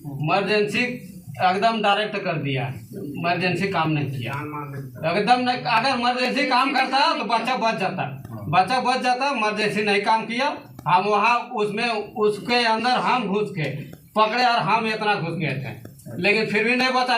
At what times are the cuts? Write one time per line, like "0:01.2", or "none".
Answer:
none